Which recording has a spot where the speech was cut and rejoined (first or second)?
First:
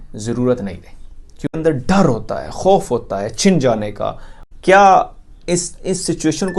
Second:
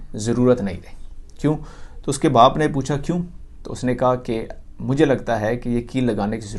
first